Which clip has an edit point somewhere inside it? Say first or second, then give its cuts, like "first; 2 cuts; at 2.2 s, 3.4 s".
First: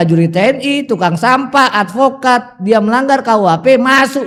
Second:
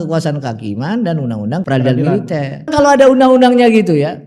second; 2 cuts; at 1.7 s, 2.7 s